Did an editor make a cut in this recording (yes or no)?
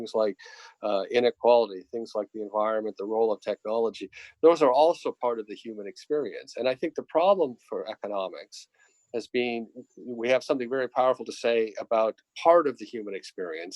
no